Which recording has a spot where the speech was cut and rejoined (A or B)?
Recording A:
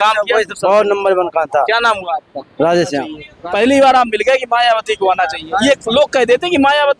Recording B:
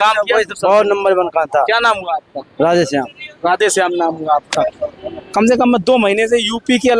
A